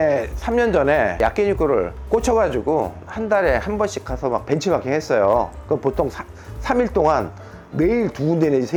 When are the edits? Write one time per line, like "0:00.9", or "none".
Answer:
none